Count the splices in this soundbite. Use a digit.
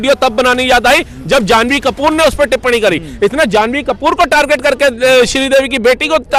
0